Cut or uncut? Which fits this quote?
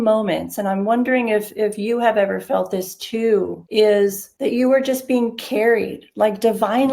cut